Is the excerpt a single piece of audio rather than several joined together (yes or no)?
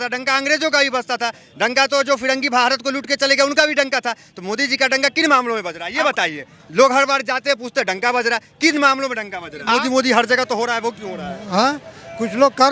no